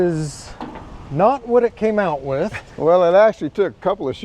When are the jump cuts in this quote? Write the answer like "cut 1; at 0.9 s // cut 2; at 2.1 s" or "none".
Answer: cut 1; at 2.6 s